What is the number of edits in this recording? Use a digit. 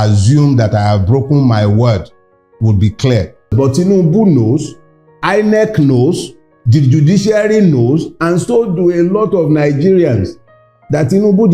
1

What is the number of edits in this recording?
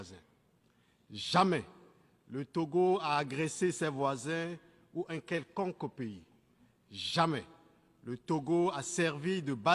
0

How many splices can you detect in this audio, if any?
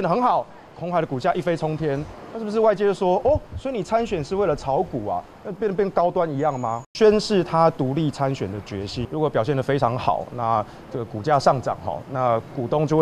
2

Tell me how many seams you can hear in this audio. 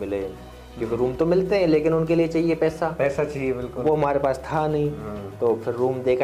0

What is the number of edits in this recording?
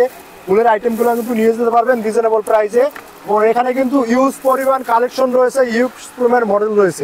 0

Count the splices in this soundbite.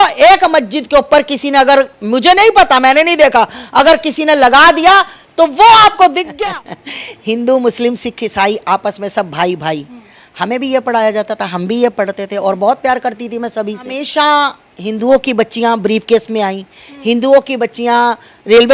2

